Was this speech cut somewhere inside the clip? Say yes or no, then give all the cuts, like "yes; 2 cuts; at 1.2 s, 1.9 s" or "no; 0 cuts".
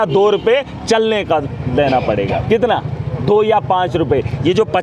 no; 0 cuts